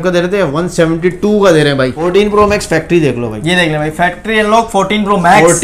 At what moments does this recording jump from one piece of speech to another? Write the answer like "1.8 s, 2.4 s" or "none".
2.0 s